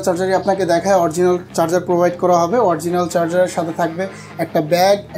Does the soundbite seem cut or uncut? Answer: uncut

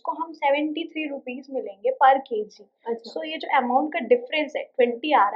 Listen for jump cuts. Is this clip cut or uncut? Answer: uncut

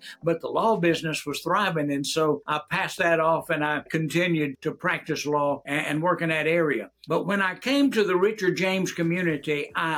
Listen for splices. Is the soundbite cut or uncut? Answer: cut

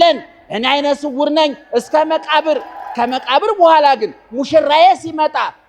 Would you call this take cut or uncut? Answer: cut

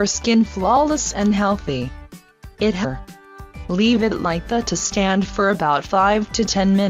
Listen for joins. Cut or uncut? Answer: uncut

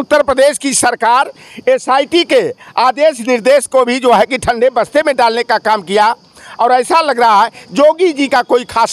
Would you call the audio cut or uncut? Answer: uncut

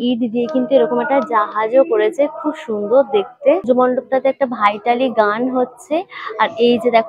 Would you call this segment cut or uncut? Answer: uncut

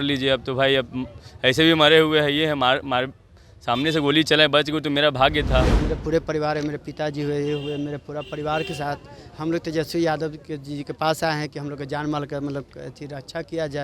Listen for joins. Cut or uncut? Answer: cut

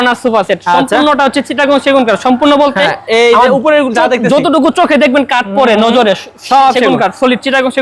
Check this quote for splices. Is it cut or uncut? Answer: uncut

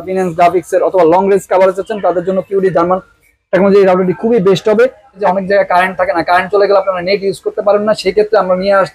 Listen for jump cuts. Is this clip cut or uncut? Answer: cut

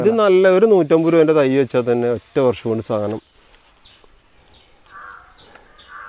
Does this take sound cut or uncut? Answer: cut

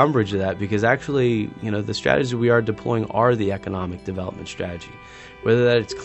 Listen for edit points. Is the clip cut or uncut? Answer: uncut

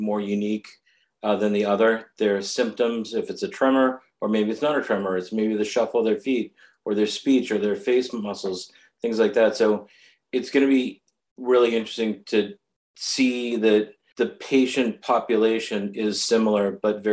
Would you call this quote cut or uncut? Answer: cut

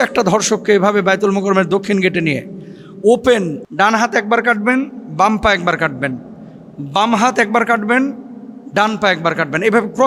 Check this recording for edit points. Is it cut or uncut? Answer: uncut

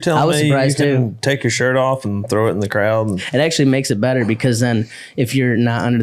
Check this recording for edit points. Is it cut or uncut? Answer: cut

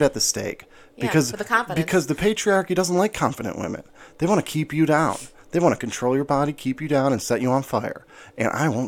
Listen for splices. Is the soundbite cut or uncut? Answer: uncut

